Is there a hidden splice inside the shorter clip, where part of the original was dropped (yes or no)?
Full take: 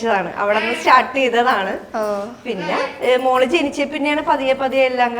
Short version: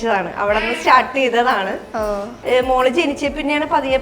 yes